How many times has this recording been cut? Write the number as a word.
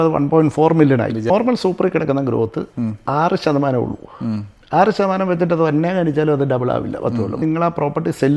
two